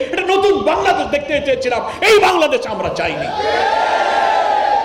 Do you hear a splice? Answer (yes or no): no